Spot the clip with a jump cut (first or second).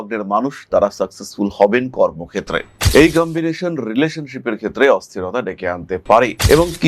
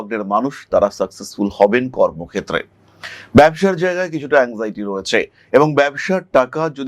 first